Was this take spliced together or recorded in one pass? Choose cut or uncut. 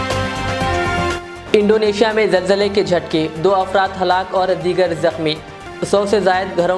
cut